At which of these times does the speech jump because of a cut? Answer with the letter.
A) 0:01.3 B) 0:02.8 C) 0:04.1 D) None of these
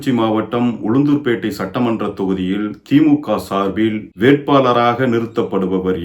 C